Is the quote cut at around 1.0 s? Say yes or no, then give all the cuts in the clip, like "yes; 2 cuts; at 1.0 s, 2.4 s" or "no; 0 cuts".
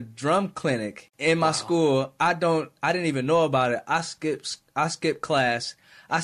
yes; 1 cut; at 1.0 s